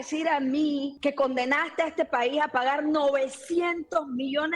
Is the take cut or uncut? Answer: cut